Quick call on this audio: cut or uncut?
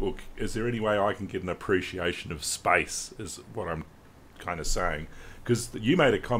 uncut